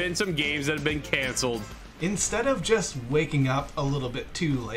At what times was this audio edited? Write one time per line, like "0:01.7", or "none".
0:01.8